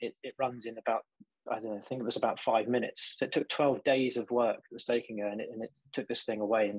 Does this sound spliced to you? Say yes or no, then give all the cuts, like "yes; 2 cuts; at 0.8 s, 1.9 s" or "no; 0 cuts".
no; 0 cuts